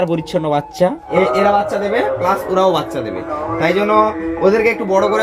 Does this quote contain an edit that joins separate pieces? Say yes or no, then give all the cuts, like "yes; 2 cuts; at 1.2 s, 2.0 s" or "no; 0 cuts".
yes; 1 cut; at 1.0 s